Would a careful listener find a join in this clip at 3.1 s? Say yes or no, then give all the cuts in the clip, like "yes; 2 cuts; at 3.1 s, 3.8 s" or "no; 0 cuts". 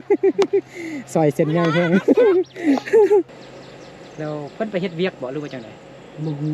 yes; 1 cut; at 3.1 s